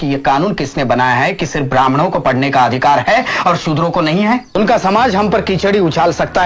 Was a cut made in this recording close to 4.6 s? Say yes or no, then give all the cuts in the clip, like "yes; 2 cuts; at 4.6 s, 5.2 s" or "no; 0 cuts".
yes; 1 cut; at 4.6 s